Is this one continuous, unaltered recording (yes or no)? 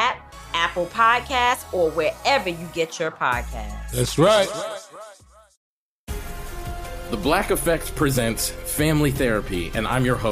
no